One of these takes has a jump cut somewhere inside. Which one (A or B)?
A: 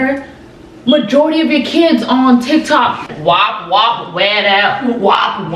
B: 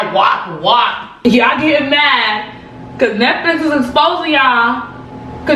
B